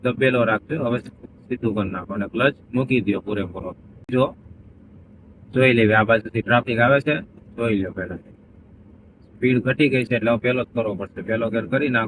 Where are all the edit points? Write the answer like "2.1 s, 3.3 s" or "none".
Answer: 4.1 s